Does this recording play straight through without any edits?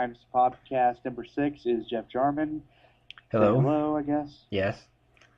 no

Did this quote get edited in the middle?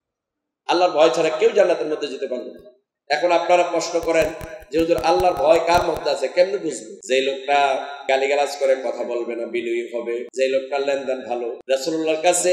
yes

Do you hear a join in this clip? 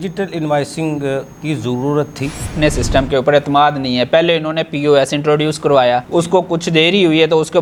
no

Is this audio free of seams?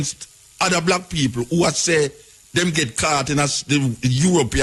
yes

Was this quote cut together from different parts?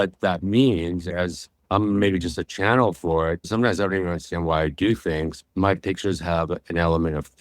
yes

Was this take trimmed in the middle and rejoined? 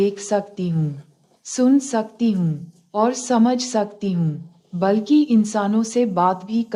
no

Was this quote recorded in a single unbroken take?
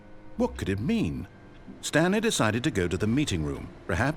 yes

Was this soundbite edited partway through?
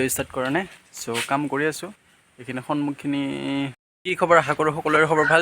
yes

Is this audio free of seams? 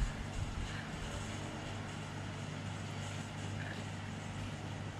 yes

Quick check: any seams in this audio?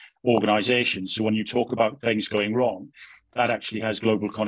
no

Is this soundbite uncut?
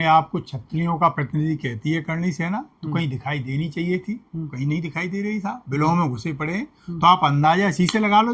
yes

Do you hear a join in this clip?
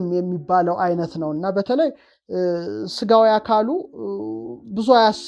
no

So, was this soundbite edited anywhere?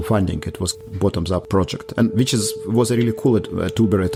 no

